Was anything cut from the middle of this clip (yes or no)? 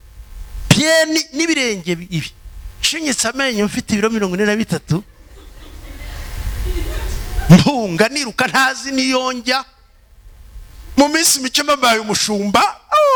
no